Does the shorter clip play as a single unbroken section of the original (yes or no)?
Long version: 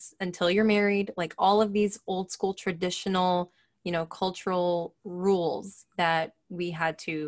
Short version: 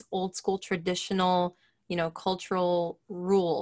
yes